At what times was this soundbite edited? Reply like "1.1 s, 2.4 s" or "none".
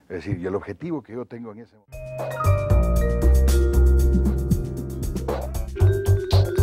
1.5 s

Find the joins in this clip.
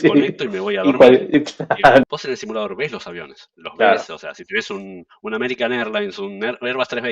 2.0 s

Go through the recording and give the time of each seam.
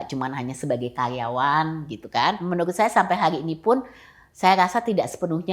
2.4 s

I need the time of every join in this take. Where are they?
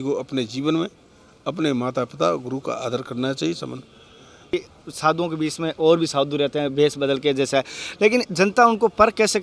4.5 s

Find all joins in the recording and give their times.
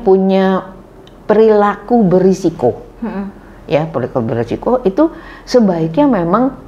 none

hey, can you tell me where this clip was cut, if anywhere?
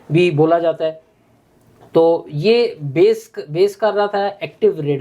none

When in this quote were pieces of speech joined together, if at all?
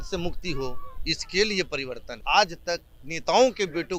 2.1 s

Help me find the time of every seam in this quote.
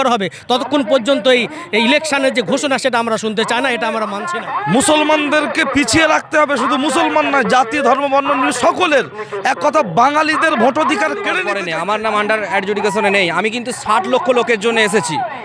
4.2 s, 11.5 s

